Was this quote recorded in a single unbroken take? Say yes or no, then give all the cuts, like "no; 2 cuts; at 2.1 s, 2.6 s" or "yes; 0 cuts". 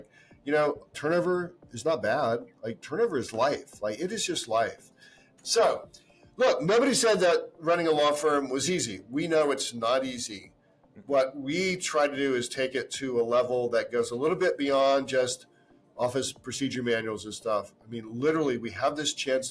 yes; 0 cuts